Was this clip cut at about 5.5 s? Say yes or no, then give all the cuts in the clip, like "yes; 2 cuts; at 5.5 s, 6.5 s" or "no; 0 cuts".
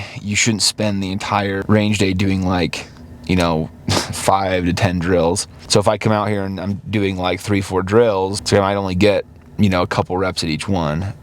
yes; 3 cuts; at 1.6 s, 5.5 s, 8.4 s